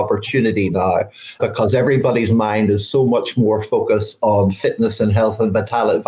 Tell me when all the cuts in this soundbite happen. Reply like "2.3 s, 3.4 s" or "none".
1.4 s

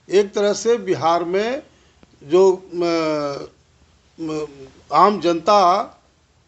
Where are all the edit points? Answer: none

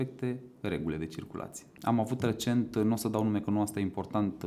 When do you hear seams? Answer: 1.7 s

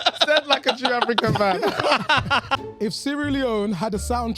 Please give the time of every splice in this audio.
2.6 s

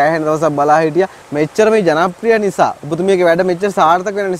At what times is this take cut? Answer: 1.2 s

